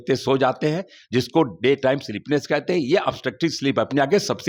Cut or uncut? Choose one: uncut